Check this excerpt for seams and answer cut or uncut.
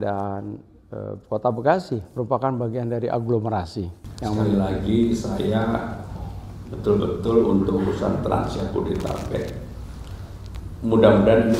cut